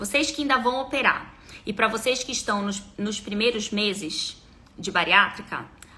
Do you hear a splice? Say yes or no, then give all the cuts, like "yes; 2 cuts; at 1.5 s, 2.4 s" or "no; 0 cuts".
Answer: no; 0 cuts